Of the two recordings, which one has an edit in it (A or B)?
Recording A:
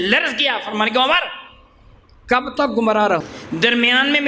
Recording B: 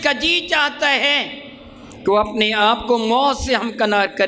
A